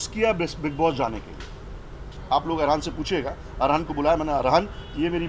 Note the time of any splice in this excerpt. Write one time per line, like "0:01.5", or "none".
0:02.1